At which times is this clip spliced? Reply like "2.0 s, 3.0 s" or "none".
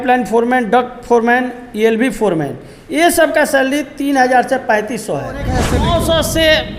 5.6 s

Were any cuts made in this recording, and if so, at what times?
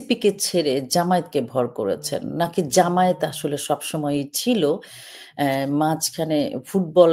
none

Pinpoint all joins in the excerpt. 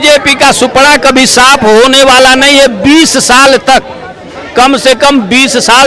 none

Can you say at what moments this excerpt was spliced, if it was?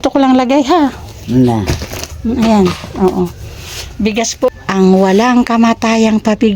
4.5 s

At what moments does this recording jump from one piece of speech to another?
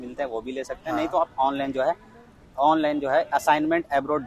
none

